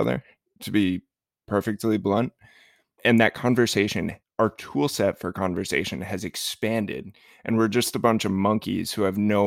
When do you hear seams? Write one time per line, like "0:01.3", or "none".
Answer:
0:03.0
0:04.2